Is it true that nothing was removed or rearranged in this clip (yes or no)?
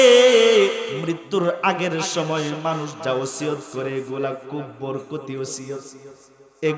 no